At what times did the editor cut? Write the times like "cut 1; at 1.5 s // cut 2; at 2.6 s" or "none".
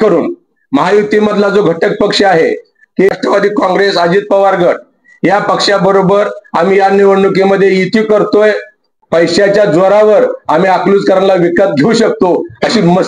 cut 1; at 3.1 s // cut 2; at 9.0 s